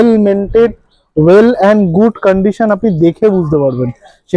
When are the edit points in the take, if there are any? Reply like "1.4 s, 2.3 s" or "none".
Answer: none